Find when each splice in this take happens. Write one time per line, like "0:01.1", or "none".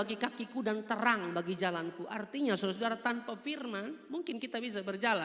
none